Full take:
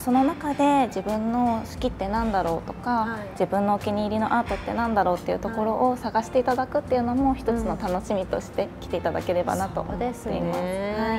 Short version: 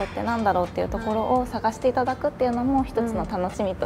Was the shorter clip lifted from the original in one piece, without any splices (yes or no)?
yes